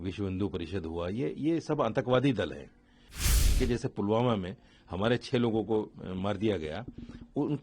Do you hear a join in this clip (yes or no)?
yes